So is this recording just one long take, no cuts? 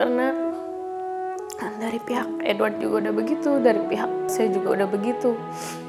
yes; 0 cuts

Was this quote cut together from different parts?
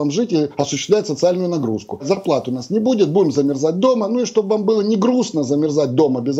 yes; 1 cut; at 2.0 s

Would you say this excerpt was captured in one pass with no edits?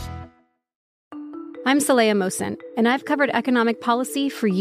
no; 1 cut; at 0.9 s

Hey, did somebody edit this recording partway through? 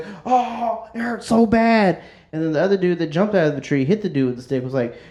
no; 0 cuts

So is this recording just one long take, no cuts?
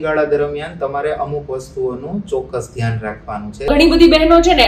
no; 1 cut; at 3.7 s

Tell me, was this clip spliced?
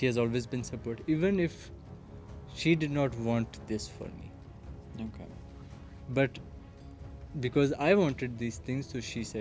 no; 0 cuts

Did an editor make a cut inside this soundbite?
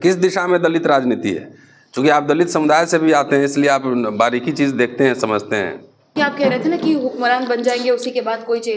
yes; 1 cut; at 6.2 s

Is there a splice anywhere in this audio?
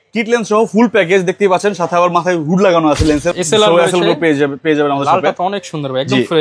yes; 1 cut; at 3.3 s

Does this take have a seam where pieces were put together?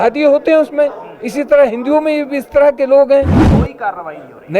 yes; 1 cut; at 3.4 s

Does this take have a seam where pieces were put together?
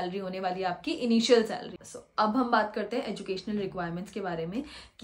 no; 0 cuts

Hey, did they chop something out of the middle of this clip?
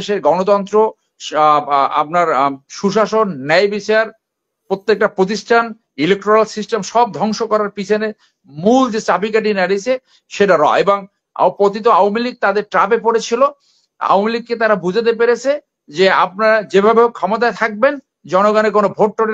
no; 0 cuts

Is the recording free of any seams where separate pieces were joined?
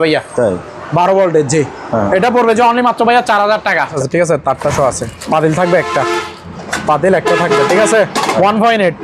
no; 1 cut; at 3.9 s

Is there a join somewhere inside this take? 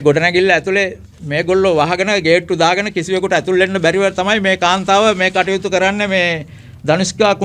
no; 0 cuts

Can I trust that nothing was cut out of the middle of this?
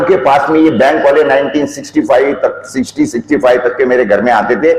yes; 0 cuts

